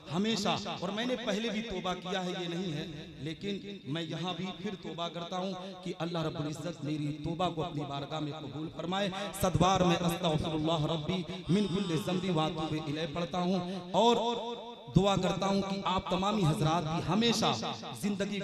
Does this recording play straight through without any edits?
yes; 0 cuts

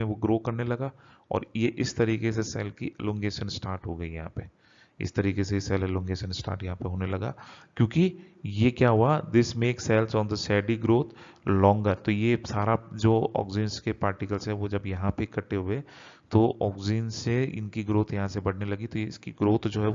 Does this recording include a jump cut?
no; 0 cuts

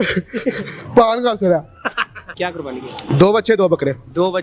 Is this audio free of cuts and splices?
no; 1 cut; at 2.3 s

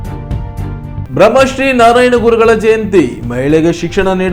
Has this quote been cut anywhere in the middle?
yes; 1 cut; at 1.0 s

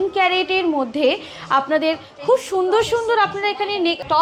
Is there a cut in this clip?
no; 0 cuts

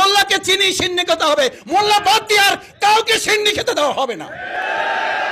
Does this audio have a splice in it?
no; 0 cuts

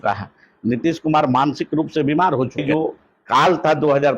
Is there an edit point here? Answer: yes; 1 cut; at 2.6 s

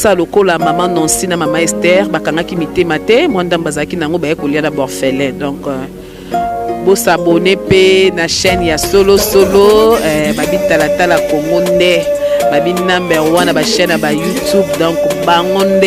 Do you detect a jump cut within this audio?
no; 0 cuts

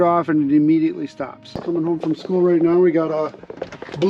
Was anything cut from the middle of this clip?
yes; 1 cut; at 1.6 s

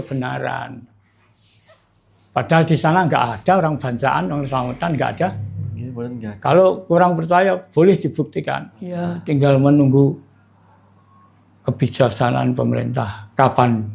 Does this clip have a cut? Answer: yes; 1 cut; at 9.1 s

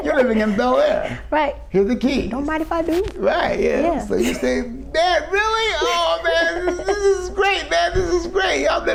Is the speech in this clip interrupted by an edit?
no; 0 cuts

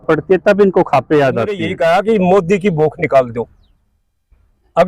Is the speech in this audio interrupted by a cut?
yes; 1 cut; at 1.6 s

